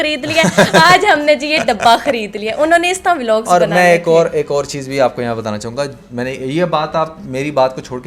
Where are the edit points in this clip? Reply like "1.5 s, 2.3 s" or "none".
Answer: none